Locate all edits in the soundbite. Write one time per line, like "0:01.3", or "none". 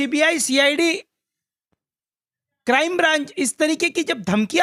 none